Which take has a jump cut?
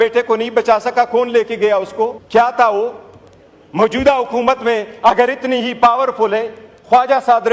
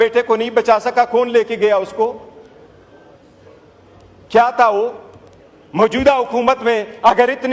first; 1 cut; at 2.2 s

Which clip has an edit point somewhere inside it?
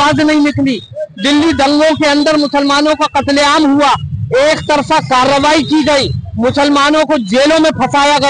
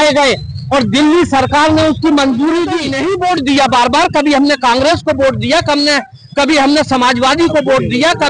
second; 1 cut; at 2.9 s

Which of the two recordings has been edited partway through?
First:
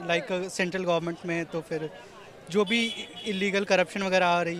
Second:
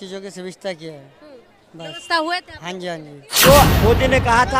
second; 1 cut; at 3.3 s

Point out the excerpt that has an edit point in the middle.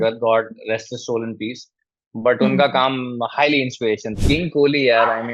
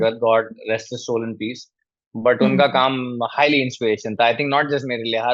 first; 1 cut; at 4.1 s

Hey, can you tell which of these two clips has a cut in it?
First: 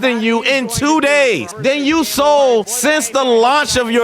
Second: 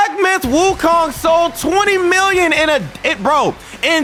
first; 2 cuts; at 1.5 s, 2.7 s

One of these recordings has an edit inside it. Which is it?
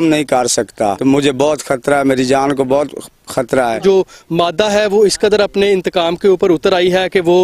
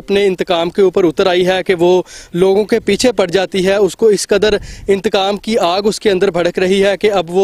first; 2 cuts; at 1.0 s, 3.8 s

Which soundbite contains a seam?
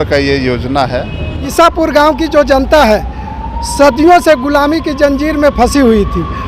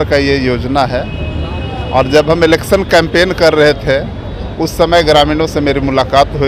first; 1 cut; at 1.5 s

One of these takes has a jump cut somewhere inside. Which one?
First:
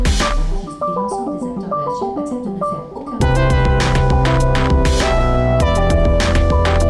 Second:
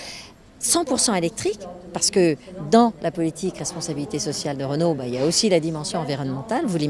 second; 1 cut; at 1.0 s

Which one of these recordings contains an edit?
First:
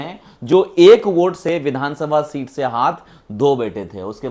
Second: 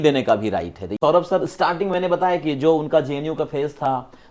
second; 1 cut; at 1.0 s

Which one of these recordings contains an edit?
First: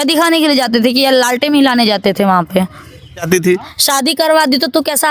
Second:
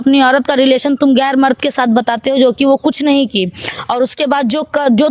first; 1 cut; at 3.2 s

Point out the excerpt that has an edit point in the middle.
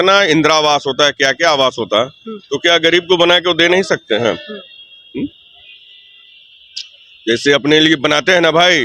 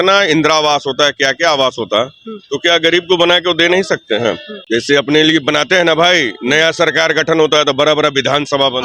second; 1 cut; at 4.5 s

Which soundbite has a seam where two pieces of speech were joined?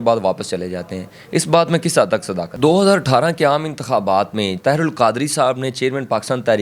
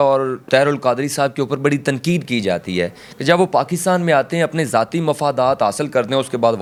first; 2 cuts; at 2.4 s, 4.5 s

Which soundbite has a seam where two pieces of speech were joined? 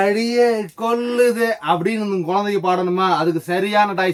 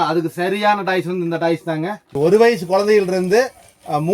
second; 1 cut; at 2.0 s

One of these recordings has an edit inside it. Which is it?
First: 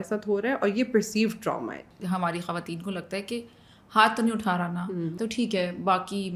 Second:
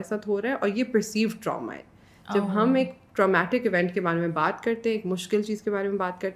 first; 2 cuts; at 1.9 s, 5.1 s

